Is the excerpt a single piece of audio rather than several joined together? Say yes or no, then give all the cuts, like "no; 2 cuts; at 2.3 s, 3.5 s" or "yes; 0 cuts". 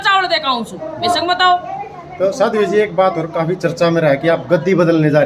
yes; 0 cuts